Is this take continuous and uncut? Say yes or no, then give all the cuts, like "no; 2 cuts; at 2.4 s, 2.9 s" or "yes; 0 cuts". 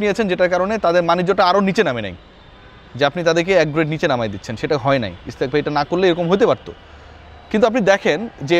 yes; 0 cuts